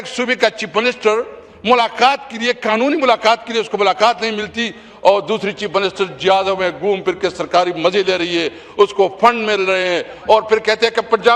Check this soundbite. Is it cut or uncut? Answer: uncut